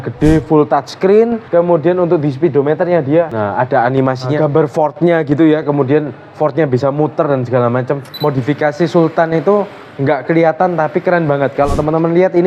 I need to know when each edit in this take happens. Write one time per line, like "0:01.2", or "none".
0:04.3
0:08.1